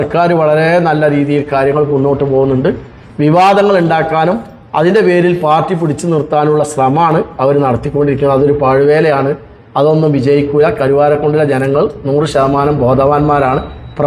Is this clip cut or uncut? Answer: uncut